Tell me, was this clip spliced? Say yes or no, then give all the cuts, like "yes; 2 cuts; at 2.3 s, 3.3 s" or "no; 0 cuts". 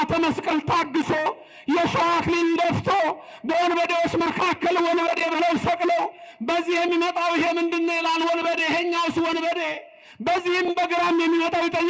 no; 0 cuts